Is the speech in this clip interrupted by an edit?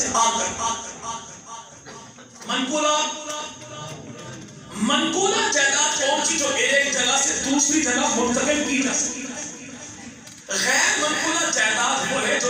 no; 0 cuts

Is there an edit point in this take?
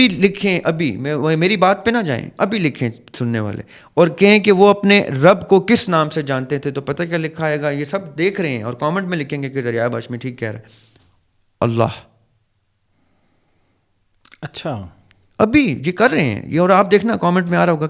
no; 0 cuts

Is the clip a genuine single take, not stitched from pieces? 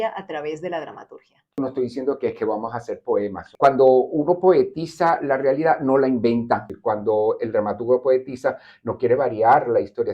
no; 3 cuts; at 1.6 s, 3.5 s, 6.7 s

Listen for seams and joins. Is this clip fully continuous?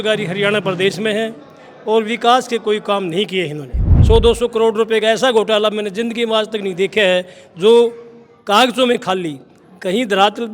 no; 1 cut; at 3.9 s

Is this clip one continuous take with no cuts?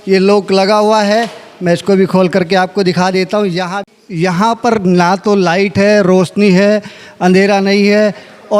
no; 1 cut; at 3.8 s

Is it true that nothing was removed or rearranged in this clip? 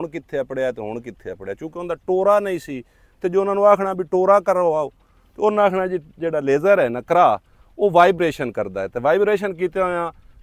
yes; 0 cuts

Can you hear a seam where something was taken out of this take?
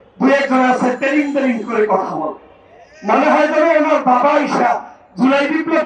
no; 0 cuts

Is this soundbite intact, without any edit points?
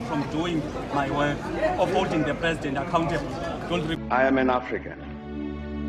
no; 1 cut; at 3.9 s

